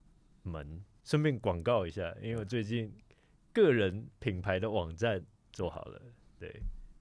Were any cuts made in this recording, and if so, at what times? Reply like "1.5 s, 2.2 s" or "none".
0.9 s